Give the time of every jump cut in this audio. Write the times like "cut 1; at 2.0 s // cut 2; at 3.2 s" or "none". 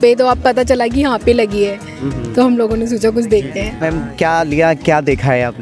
cut 1; at 3.7 s